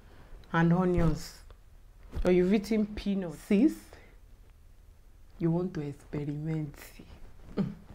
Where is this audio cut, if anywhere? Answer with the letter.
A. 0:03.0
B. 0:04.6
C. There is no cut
A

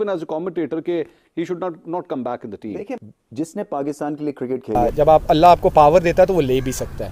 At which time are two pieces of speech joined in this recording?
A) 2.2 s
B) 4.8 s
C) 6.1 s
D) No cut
B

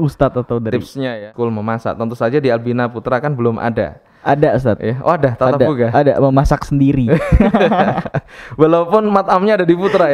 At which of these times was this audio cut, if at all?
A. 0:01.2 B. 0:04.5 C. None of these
A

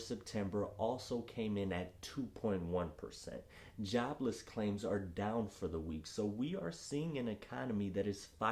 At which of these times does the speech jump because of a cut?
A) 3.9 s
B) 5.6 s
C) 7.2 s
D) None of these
D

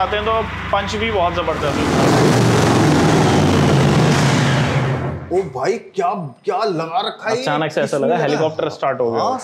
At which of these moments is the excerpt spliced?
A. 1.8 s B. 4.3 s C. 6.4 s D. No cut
A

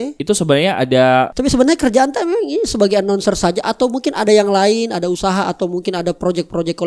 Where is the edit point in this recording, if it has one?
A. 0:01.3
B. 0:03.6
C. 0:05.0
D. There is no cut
A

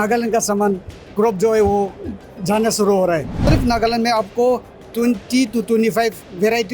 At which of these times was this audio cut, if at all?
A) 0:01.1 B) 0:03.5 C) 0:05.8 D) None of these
B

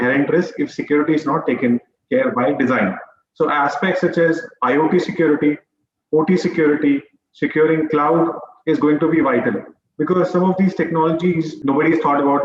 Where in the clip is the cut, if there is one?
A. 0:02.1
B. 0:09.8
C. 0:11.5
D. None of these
C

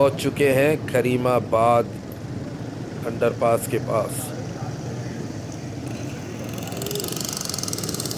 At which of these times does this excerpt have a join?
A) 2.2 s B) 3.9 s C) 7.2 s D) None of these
D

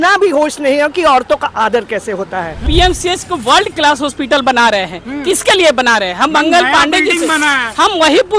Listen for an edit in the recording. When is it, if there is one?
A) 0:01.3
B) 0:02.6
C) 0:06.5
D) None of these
B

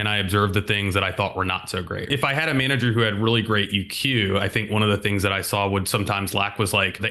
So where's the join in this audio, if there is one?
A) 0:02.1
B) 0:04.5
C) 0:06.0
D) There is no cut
A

